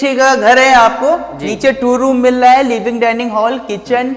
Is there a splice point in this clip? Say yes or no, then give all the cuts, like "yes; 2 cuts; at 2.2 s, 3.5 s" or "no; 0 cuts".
no; 0 cuts